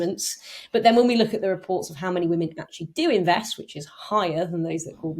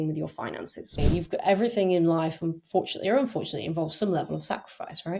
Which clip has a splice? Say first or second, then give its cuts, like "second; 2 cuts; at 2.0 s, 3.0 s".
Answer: second; 1 cut; at 0.9 s